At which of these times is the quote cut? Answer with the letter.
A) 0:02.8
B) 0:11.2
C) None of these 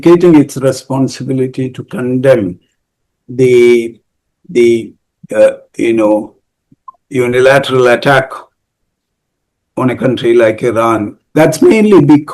B